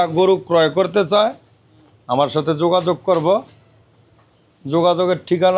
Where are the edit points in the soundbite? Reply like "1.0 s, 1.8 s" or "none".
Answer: none